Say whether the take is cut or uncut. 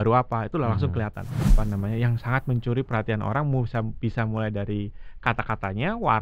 cut